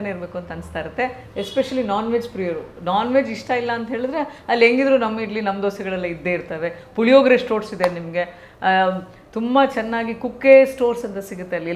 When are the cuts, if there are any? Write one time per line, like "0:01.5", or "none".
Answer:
none